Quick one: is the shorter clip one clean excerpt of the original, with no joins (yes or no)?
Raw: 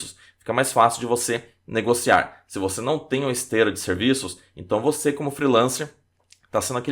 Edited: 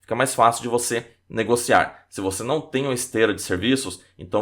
yes